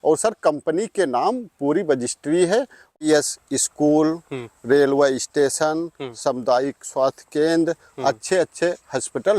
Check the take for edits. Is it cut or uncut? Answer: cut